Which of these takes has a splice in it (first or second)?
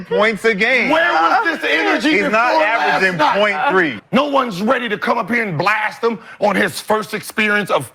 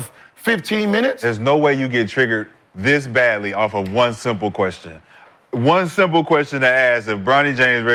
first